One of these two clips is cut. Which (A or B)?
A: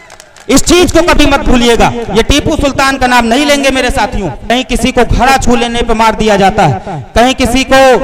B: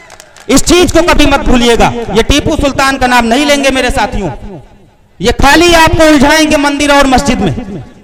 A